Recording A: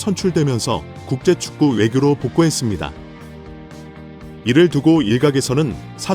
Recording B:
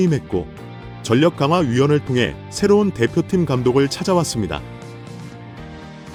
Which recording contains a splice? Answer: A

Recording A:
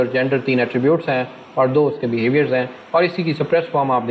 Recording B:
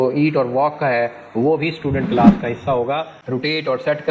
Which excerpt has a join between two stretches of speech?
B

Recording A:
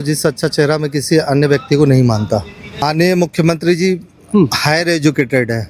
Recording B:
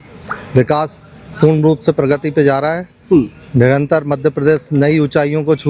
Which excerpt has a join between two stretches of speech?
A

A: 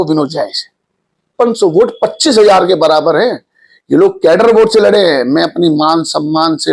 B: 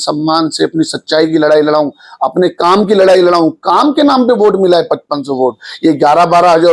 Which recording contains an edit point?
A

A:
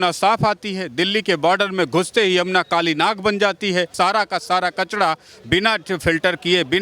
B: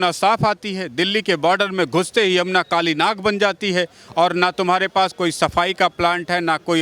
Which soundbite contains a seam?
A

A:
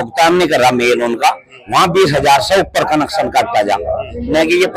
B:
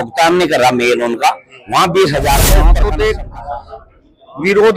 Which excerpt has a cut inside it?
B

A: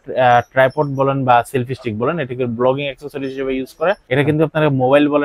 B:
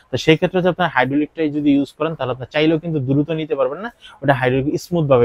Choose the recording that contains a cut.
A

